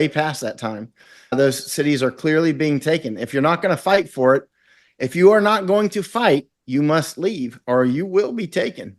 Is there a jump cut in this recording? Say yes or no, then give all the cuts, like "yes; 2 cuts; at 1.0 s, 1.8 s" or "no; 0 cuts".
no; 0 cuts